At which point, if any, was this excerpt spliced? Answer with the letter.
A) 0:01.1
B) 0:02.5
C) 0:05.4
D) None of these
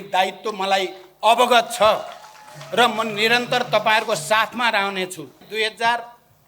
C